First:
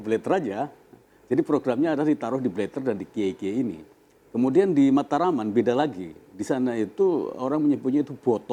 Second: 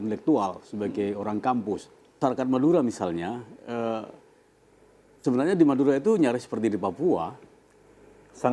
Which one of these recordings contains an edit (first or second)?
second